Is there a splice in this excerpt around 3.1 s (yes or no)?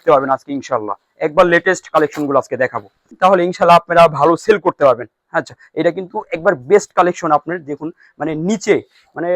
yes